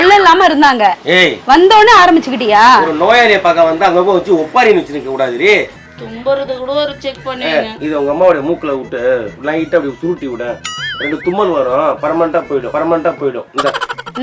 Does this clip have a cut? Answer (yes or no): yes